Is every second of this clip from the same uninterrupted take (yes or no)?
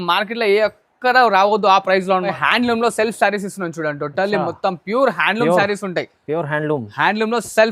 no